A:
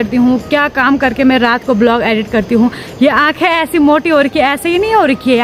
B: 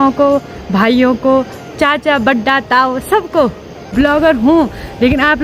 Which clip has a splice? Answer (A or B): B